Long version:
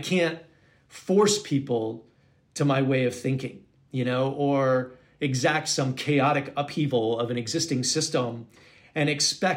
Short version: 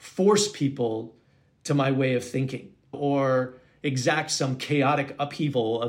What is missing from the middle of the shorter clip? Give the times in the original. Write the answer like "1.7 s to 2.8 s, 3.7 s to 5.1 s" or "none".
3.9 s to 4.3 s